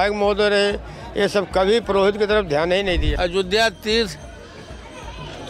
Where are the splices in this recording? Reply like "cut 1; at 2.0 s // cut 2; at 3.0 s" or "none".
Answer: cut 1; at 3.1 s